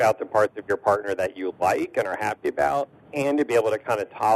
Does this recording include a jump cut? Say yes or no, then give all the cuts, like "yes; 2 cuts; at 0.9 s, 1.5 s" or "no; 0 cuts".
yes; 1 cut; at 3.0 s